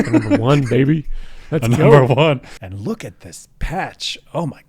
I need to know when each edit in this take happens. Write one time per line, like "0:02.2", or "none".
0:02.5